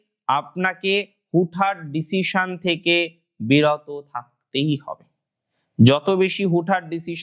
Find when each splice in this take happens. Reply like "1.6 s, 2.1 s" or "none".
none